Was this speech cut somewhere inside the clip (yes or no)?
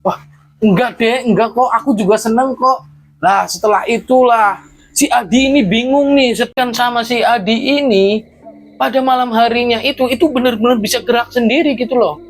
yes